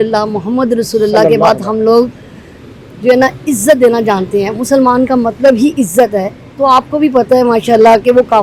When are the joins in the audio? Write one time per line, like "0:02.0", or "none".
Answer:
none